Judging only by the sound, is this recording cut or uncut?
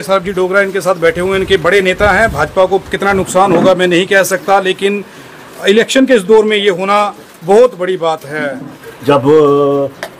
cut